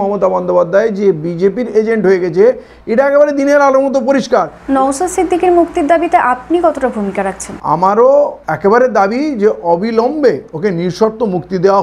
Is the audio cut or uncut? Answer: cut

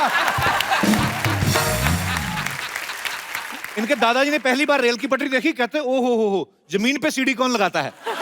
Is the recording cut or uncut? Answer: cut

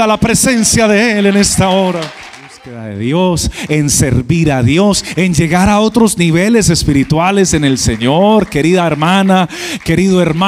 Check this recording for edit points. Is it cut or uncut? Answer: cut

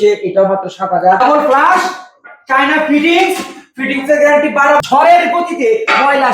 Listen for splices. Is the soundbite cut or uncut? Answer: cut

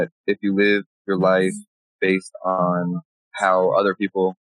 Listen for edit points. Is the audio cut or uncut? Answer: cut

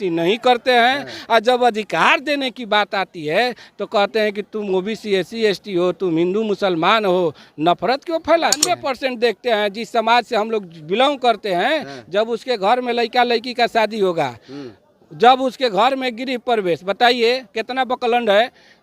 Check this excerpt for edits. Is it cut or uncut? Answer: cut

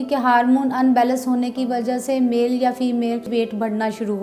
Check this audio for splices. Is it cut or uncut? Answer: cut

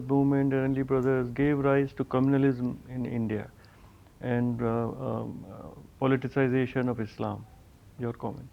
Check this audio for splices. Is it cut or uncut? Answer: uncut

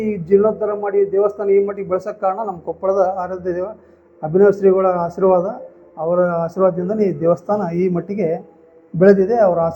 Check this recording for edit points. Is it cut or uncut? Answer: uncut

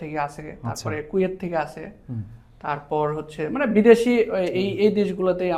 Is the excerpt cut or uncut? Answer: uncut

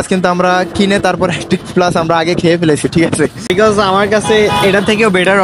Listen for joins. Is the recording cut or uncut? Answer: cut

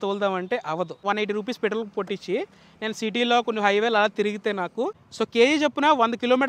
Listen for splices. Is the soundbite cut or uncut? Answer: cut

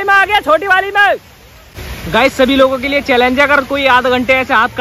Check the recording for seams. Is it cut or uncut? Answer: cut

